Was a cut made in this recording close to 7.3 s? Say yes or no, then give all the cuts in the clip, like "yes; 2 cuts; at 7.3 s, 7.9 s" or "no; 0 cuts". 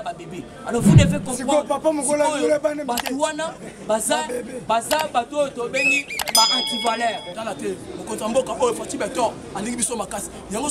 yes; 1 cut; at 7.3 s